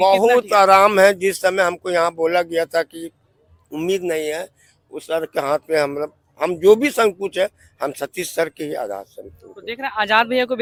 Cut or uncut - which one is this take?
uncut